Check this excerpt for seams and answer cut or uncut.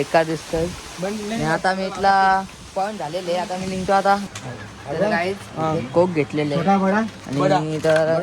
cut